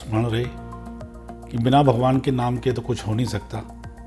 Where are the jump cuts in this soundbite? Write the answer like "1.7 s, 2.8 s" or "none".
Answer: none